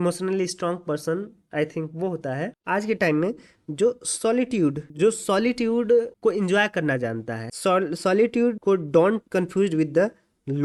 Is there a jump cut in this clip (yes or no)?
no